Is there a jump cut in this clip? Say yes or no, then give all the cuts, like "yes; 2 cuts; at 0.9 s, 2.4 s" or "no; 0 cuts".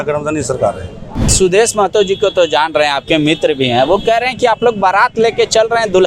yes; 1 cut; at 1.3 s